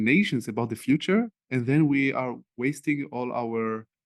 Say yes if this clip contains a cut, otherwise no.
no